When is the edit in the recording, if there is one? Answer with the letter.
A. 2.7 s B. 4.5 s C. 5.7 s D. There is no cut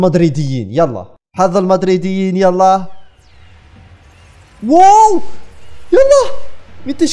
D